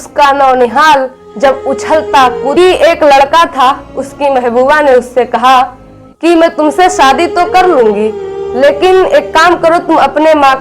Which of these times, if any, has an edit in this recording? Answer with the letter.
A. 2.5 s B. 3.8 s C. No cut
A